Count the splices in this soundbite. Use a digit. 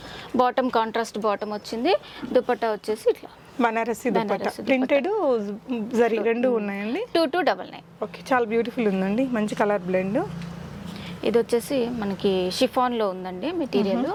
0